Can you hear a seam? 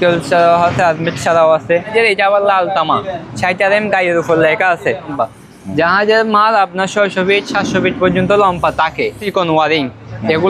yes; 3 cuts; at 1.9 s, 5.1 s, 9.2 s

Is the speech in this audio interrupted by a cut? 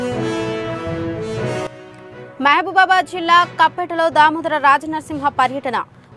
yes; 1 cut; at 1.7 s

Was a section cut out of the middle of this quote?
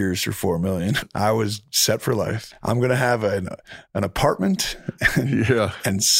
yes; 2 cuts; at 1.0 s, 2.4 s

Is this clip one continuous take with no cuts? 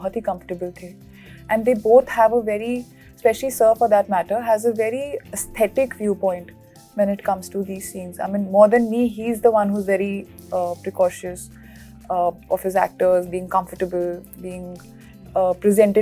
yes; 0 cuts

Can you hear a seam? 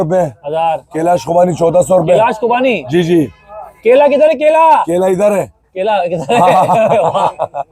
no; 0 cuts

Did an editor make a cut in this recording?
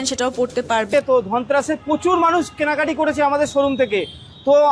yes; 1 cut; at 0.9 s

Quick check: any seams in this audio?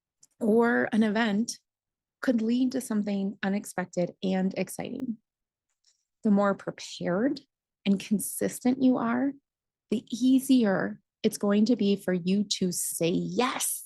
yes; 1 cut; at 12.9 s

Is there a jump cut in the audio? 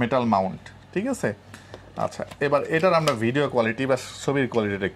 no; 0 cuts

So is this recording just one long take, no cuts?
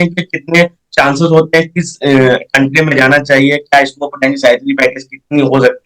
yes; 0 cuts

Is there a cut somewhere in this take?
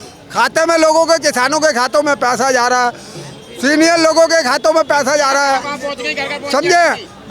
no; 0 cuts

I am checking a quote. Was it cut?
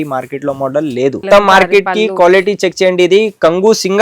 yes; 1 cut; at 1.2 s

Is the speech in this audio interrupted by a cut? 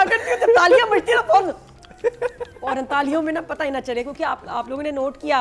no; 0 cuts

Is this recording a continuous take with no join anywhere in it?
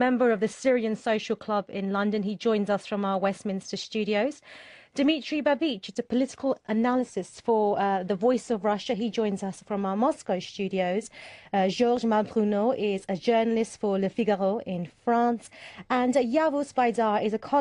no; 1 cut; at 3.8 s

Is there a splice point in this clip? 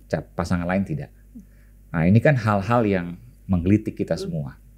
no; 0 cuts

